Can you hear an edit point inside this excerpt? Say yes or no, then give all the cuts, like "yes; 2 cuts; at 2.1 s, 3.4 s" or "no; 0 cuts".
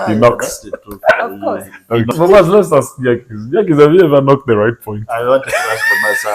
yes; 1 cut; at 2.1 s